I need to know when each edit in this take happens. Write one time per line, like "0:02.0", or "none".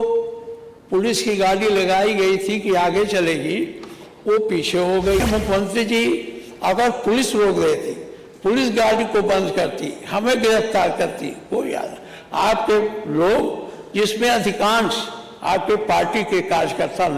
0:05.2